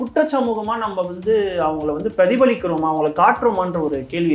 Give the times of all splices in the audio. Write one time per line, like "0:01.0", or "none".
none